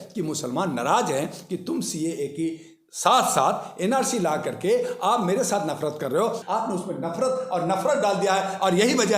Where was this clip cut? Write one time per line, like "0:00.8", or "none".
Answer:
0:06.4